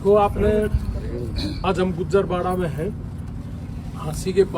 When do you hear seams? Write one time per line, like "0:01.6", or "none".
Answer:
0:01.5

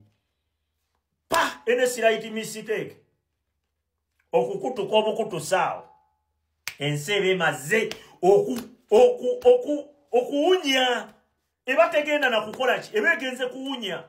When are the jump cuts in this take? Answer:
0:04.9

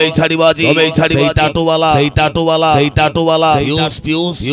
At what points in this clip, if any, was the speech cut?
0:01.0

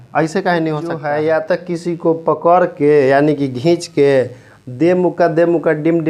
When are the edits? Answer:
0:01.0

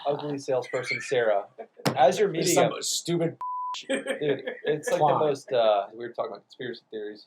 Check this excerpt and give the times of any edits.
0:05.9

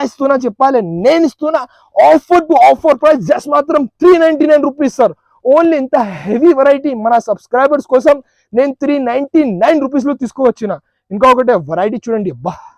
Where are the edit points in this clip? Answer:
none

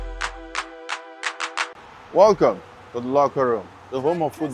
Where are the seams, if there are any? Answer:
0:01.7

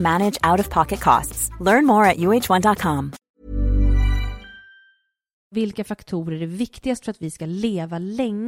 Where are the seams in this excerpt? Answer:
0:05.5

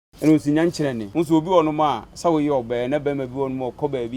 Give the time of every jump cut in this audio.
0:01.0
0:02.1

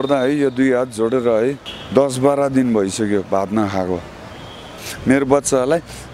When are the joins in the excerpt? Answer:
0:01.7
0:04.9

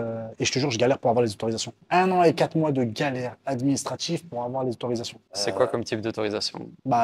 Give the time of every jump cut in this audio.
none

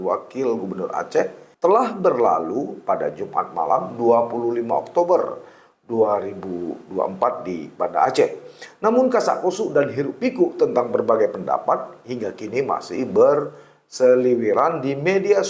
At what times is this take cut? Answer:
0:01.4

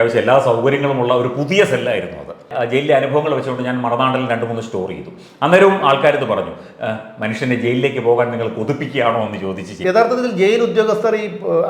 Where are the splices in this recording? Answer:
0:02.5
0:09.7

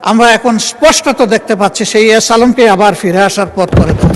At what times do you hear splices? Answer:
none

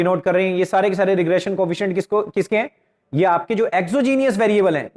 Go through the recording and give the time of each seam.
none

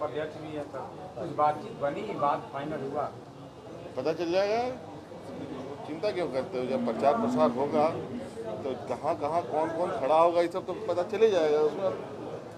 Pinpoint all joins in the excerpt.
none

